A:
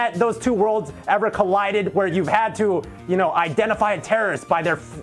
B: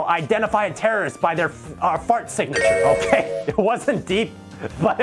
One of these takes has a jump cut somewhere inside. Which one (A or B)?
B